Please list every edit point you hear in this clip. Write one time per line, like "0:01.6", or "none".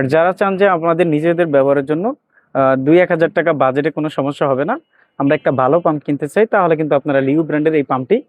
none